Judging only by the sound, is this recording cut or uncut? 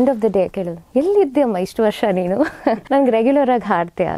cut